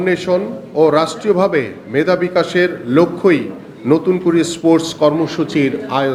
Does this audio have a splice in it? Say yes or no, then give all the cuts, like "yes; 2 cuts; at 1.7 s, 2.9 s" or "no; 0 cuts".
no; 0 cuts